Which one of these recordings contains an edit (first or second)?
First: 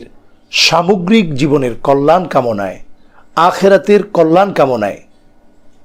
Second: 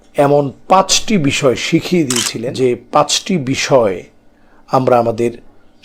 second